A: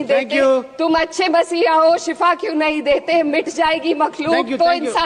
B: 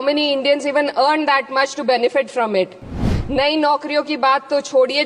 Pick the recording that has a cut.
B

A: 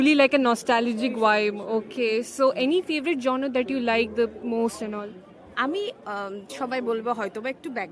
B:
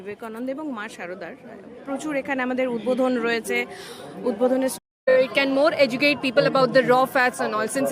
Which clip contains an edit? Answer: B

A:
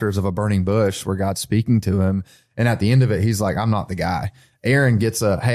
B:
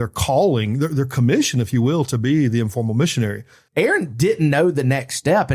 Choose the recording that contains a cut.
B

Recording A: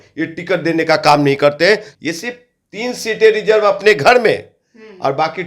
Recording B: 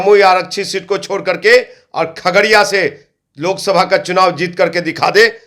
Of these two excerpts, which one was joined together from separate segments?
A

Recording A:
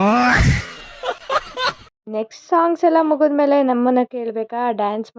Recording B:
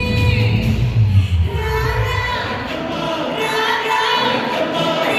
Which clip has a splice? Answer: A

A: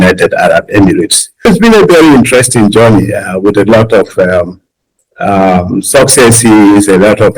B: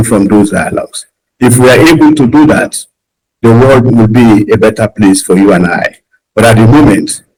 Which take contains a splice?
A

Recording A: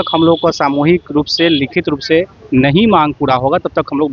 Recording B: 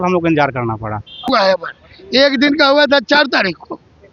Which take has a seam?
B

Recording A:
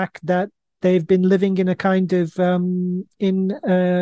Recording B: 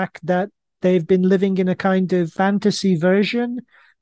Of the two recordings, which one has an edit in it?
B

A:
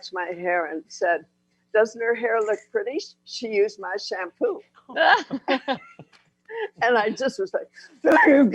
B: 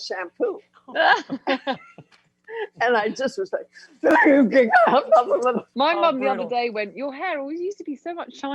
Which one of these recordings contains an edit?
B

